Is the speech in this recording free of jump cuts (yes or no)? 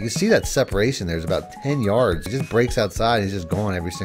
no